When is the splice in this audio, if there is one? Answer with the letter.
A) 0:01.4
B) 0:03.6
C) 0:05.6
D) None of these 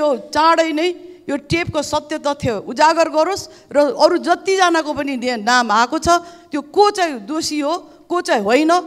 D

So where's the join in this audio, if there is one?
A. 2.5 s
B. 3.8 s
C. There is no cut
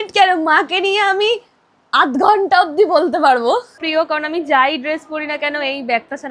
B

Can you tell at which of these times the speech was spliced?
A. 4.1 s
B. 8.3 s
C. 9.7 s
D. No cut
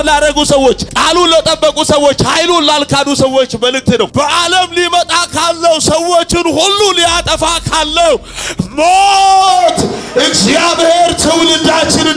A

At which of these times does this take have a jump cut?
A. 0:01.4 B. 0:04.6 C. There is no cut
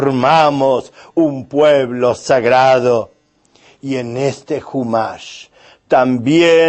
A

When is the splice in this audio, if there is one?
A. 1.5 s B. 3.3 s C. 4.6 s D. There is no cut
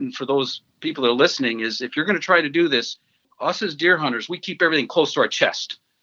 B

